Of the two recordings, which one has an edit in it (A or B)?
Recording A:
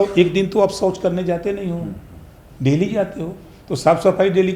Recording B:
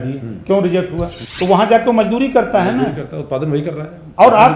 B